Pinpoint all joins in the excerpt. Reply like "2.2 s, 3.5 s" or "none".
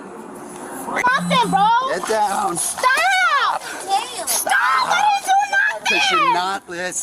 1.0 s